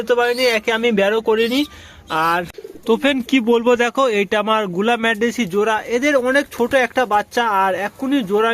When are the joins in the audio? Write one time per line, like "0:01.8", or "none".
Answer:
0:02.6